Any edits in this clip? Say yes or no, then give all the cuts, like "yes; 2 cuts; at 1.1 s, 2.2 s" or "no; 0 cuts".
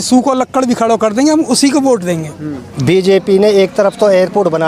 yes; 1 cut; at 2.6 s